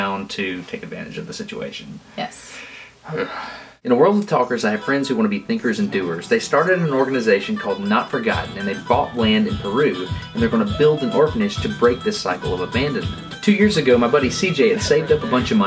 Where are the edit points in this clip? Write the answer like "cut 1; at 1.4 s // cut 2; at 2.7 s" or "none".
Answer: none